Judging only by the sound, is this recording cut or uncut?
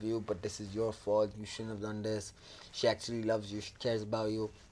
uncut